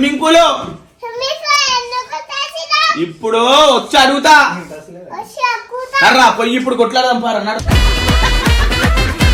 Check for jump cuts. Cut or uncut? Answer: uncut